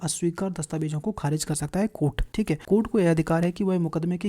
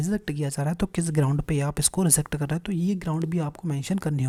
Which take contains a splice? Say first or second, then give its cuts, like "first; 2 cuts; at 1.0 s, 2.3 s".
first; 1 cut; at 2.4 s